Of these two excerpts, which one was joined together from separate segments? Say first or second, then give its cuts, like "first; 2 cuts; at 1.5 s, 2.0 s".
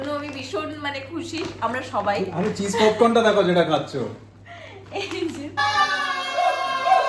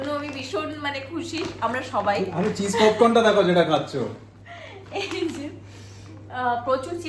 first; 1 cut; at 5.6 s